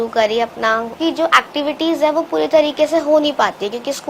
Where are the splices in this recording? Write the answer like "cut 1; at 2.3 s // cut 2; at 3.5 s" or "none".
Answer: cut 1; at 1.0 s